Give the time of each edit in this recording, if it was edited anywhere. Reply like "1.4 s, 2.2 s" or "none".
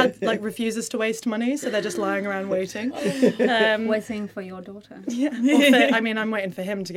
none